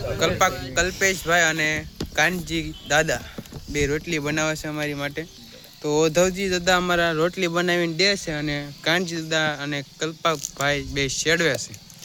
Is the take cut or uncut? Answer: uncut